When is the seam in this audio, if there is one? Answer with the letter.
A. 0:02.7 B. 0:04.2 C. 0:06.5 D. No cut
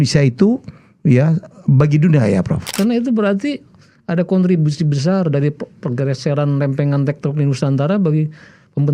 A